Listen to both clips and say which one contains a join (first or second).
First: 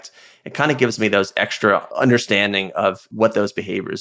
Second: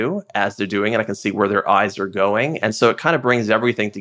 first